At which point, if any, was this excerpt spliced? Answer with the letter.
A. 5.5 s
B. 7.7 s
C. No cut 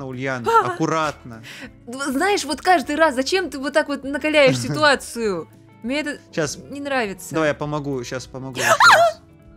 C